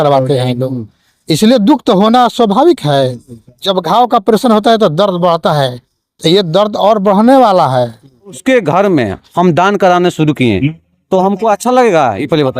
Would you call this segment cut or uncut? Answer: cut